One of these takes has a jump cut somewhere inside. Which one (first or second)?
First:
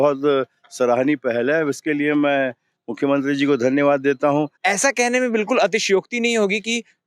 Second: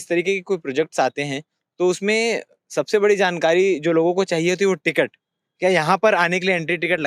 first